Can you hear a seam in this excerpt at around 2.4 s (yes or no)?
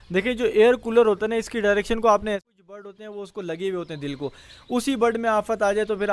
yes